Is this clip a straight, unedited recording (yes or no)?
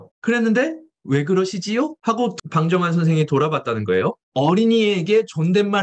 no